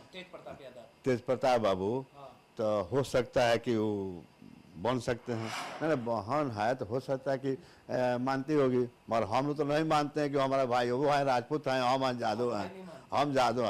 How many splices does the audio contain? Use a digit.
1